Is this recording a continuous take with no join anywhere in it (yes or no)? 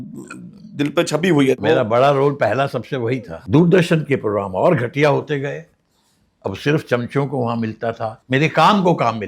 no